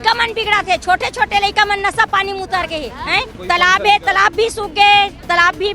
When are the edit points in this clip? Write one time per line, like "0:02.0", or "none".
0:03.4